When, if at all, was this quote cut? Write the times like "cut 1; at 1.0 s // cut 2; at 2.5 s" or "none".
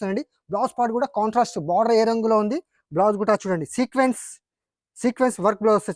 none